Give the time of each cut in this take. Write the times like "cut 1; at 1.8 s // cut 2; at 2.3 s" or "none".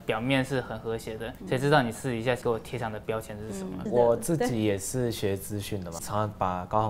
cut 1; at 1.3 s // cut 2; at 2.4 s // cut 3; at 3.8 s // cut 4; at 6.0 s